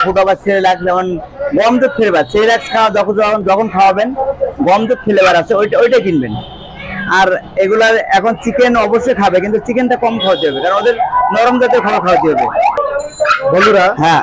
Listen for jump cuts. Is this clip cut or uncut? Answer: uncut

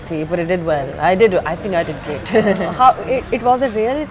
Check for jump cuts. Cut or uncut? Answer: uncut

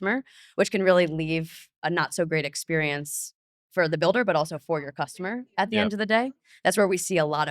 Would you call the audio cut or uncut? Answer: cut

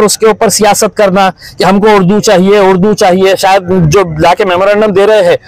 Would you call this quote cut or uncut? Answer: uncut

